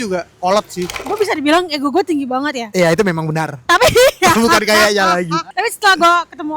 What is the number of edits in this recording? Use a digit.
2